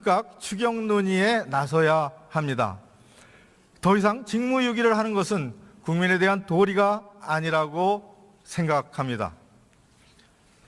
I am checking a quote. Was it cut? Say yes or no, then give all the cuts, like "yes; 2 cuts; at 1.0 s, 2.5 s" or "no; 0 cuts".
yes; 1 cut; at 8.3 s